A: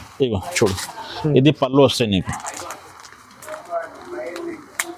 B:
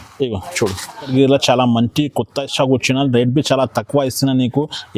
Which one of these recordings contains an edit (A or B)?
B